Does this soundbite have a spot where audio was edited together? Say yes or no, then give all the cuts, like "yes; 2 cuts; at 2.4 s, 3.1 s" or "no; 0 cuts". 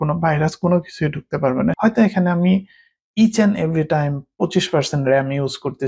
yes; 1 cut; at 1.8 s